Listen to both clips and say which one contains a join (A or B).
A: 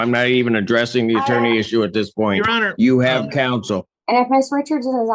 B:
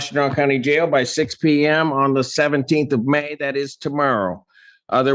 A